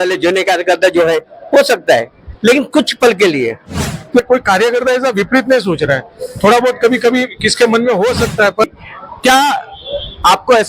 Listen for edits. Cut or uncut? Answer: cut